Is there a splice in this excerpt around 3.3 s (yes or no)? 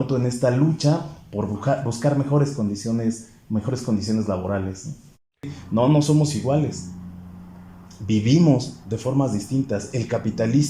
no